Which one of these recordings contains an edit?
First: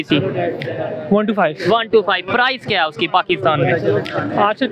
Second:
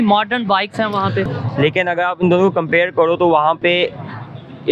second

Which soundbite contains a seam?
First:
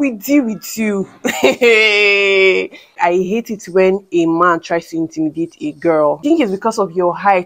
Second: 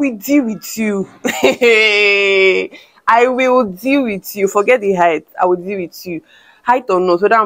first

